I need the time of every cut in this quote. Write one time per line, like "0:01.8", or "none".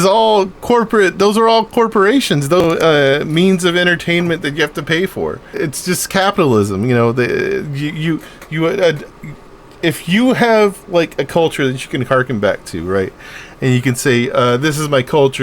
0:02.6
0:05.4